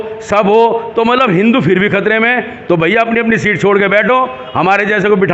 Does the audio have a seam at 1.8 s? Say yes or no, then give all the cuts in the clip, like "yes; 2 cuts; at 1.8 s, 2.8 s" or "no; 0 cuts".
no; 0 cuts